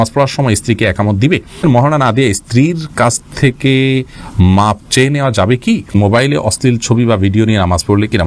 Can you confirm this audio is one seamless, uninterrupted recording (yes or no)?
no